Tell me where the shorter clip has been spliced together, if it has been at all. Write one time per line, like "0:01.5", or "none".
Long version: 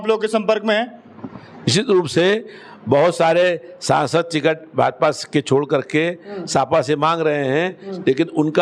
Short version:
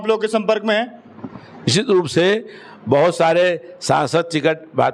none